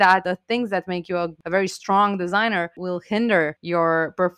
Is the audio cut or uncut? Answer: cut